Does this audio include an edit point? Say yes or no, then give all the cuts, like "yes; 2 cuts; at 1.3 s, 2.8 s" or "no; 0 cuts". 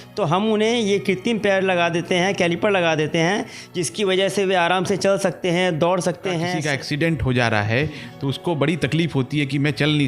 yes; 1 cut; at 6.6 s